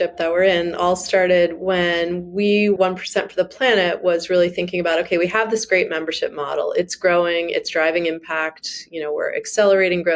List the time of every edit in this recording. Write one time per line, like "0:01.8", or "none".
0:02.8